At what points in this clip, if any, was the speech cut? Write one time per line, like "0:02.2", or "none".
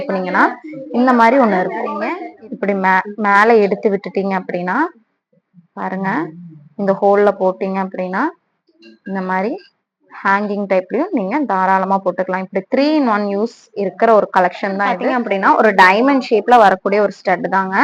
0:14.9